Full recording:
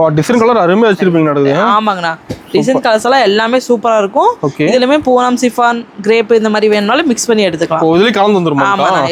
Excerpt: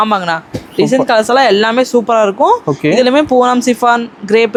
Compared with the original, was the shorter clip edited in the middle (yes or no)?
no